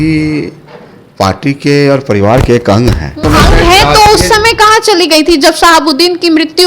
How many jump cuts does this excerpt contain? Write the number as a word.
one